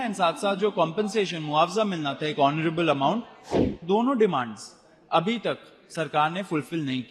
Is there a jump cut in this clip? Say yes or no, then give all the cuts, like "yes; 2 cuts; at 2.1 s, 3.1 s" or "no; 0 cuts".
yes; 1 cut; at 3.8 s